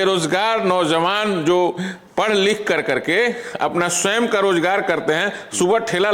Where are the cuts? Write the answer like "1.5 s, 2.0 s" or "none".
none

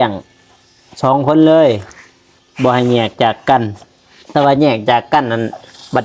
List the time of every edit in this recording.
none

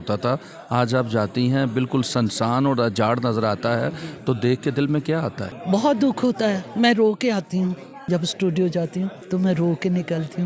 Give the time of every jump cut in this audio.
9.2 s

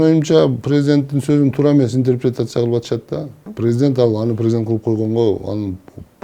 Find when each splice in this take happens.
3.4 s

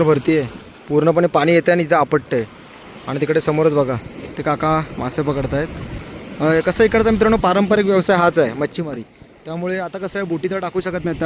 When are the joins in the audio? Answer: none

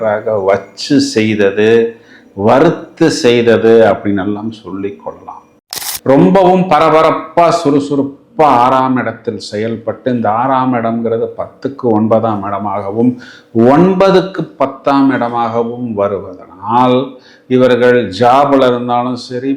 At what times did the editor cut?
5.9 s

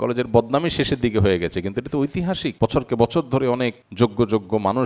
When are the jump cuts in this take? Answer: 2.5 s, 3.8 s

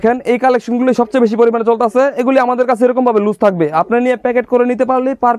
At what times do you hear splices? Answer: none

